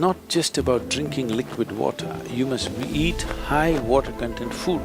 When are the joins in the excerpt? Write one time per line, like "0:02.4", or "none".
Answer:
none